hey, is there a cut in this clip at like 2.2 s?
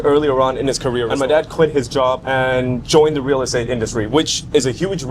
yes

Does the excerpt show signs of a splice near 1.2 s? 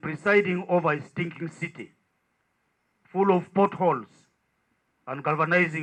no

